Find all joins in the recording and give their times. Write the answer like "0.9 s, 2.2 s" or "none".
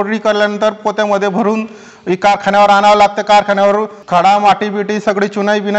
4.0 s